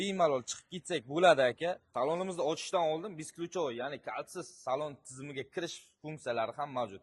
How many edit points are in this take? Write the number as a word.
one